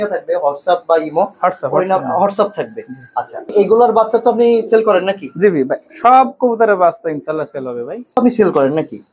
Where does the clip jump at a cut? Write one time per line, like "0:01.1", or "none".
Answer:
0:03.5
0:08.1